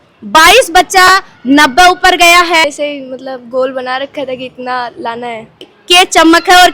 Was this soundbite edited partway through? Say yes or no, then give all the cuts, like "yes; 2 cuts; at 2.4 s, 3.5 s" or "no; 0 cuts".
yes; 2 cuts; at 2.6 s, 5.7 s